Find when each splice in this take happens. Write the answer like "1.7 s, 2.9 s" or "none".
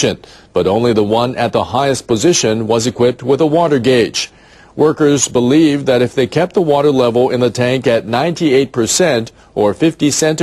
7.8 s